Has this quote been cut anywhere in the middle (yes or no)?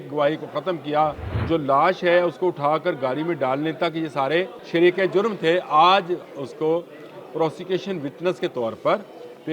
yes